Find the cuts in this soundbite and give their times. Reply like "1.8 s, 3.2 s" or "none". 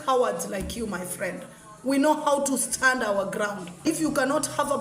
3.9 s